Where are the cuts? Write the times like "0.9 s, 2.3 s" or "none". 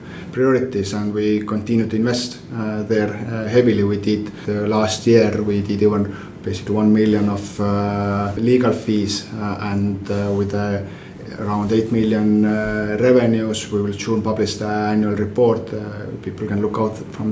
4.4 s, 8.4 s